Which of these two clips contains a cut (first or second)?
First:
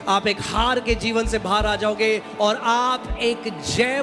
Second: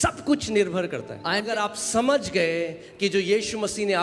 second